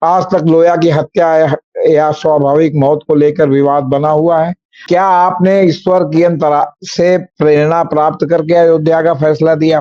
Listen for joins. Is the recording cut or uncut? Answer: cut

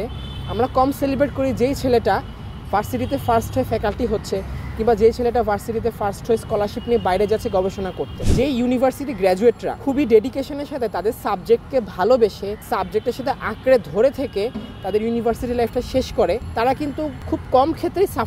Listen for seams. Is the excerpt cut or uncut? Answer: cut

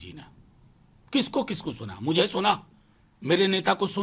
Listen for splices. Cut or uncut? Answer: uncut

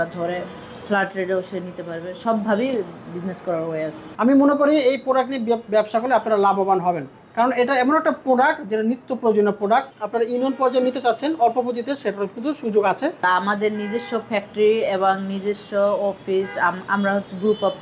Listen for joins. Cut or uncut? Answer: cut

